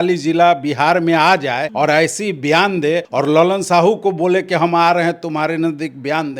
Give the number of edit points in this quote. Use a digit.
2